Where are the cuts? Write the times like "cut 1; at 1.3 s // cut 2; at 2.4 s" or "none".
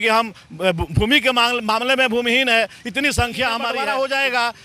cut 1; at 3.7 s